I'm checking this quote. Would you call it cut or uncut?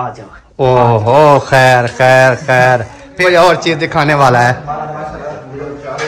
cut